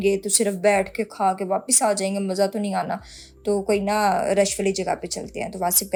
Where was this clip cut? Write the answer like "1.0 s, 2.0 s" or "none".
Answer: none